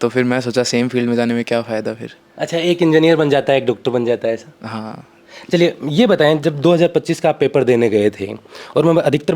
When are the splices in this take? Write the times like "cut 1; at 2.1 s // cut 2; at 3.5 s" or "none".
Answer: none